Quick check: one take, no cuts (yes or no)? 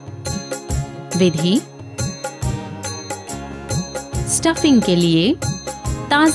no